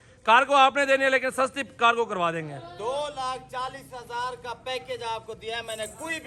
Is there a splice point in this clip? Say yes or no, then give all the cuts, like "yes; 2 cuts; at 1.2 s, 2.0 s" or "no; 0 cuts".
no; 0 cuts